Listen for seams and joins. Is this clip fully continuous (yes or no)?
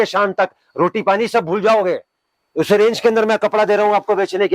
yes